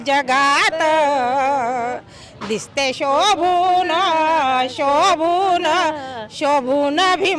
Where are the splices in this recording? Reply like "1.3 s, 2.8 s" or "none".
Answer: none